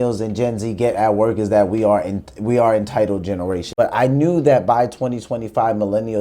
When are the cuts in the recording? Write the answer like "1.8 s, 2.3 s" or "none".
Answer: 3.7 s

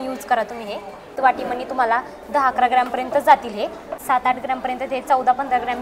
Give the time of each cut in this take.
1.1 s, 3.9 s

